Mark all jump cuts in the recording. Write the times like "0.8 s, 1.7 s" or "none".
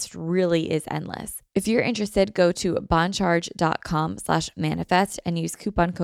1.3 s